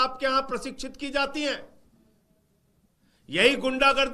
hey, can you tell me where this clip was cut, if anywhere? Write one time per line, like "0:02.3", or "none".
none